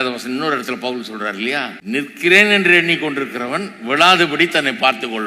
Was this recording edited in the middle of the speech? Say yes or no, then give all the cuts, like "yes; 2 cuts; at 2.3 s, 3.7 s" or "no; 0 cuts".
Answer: yes; 1 cut; at 1.8 s